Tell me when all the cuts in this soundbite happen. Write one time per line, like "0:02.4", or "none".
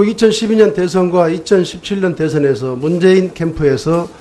0:02.1